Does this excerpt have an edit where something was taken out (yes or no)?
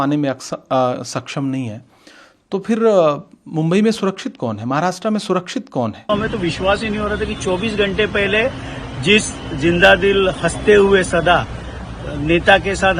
yes